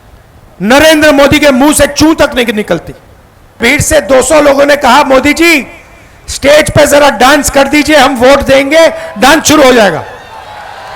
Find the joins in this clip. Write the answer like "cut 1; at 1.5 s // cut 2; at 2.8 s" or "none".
cut 1; at 3.6 s